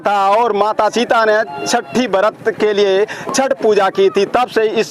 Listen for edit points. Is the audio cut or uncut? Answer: cut